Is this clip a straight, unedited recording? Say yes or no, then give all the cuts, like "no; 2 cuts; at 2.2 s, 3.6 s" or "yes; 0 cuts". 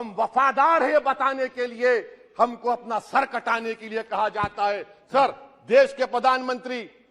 yes; 0 cuts